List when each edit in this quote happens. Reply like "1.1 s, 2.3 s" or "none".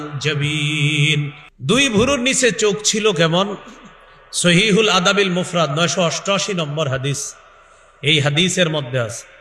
1.4 s